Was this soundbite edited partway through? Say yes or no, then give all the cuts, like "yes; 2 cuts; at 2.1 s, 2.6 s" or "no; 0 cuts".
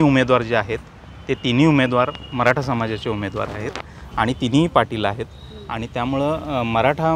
no; 0 cuts